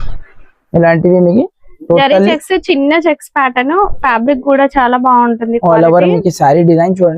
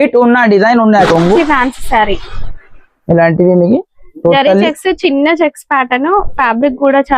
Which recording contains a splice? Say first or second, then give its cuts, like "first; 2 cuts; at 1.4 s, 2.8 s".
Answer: second; 1 cut; at 1.1 s